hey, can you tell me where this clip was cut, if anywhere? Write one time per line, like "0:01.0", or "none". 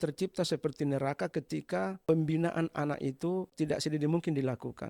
0:02.0
0:03.5